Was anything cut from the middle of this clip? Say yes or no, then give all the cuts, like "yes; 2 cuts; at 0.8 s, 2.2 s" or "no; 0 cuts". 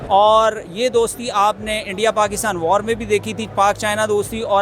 no; 0 cuts